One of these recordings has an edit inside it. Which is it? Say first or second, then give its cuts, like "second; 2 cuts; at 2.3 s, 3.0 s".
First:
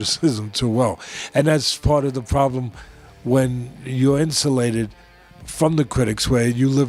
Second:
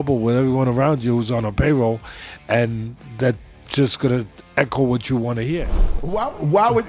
second; 1 cut; at 5.8 s